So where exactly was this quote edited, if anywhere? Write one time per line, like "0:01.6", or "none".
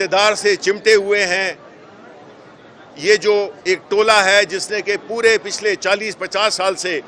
none